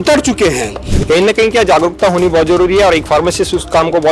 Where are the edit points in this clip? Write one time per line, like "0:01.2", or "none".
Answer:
0:00.9